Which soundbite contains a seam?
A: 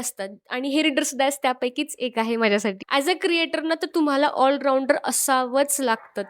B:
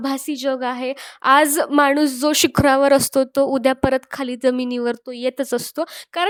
A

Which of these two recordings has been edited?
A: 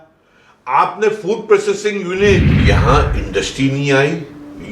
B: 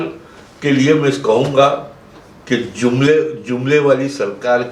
A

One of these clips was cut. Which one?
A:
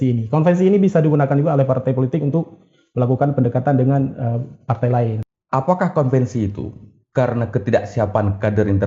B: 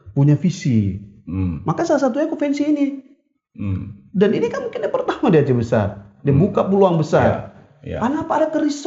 A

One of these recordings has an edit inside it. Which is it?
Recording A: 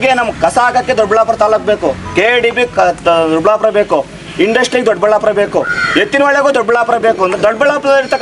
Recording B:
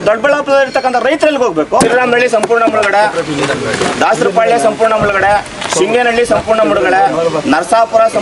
B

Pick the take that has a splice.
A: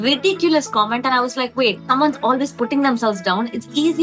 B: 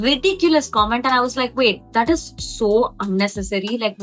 A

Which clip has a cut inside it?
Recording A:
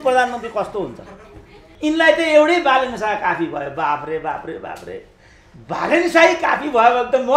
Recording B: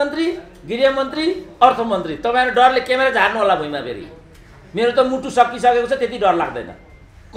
A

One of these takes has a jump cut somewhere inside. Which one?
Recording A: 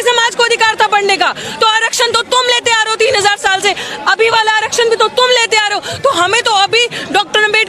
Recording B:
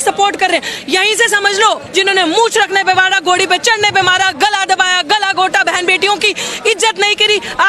B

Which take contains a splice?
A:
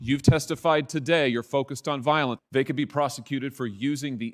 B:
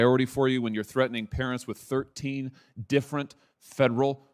A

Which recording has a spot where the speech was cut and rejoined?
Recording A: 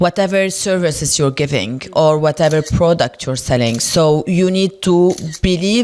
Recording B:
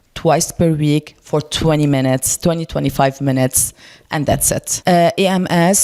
B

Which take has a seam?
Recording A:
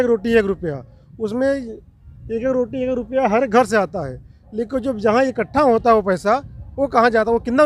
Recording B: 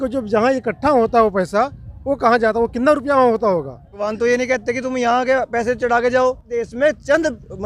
B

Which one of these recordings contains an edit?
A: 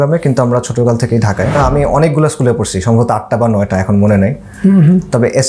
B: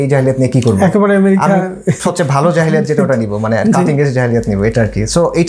A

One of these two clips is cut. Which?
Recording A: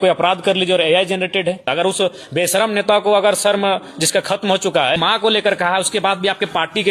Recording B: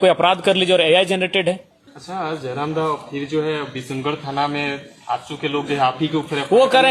A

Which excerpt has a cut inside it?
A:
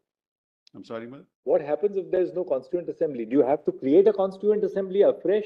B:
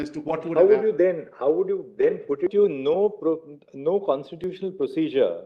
B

